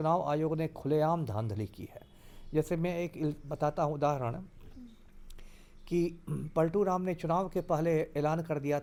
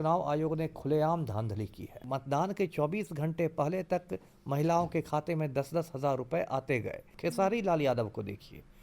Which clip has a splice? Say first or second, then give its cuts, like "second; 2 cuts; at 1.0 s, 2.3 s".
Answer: second; 2 cuts; at 2.0 s, 7.1 s